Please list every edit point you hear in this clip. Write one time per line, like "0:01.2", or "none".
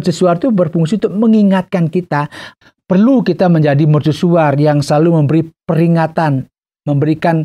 0:02.5